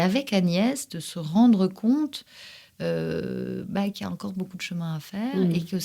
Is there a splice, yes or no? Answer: no